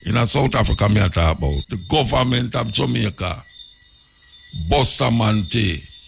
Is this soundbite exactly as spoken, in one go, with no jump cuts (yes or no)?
no